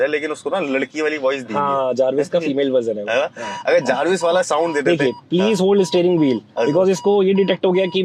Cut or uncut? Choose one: uncut